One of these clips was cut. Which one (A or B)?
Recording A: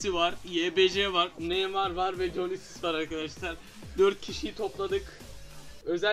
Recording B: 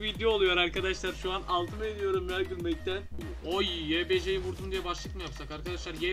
B